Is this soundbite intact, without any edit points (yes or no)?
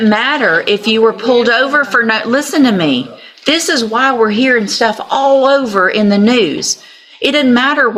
yes